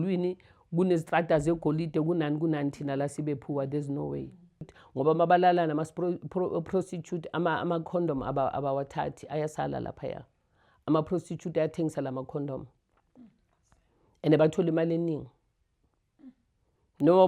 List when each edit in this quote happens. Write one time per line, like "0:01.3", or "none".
0:04.8